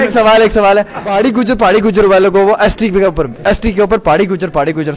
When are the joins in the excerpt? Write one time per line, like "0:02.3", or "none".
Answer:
0:01.0